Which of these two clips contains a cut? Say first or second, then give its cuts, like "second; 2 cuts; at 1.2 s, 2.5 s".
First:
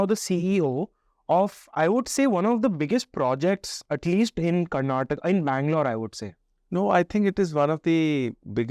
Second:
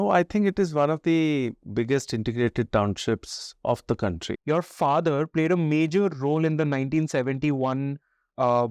second; 1 cut; at 4.3 s